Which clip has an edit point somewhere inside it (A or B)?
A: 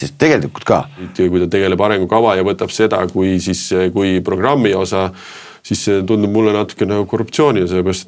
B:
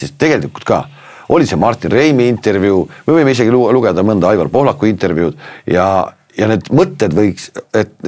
A